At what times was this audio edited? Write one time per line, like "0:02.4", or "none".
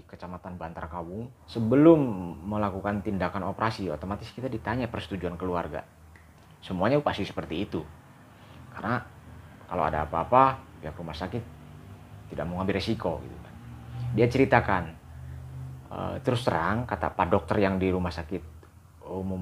0:01.4